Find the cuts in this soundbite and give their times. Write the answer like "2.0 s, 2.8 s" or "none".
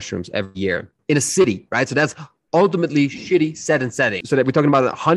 1.0 s, 4.2 s